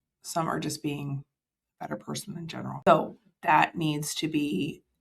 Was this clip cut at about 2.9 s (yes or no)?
yes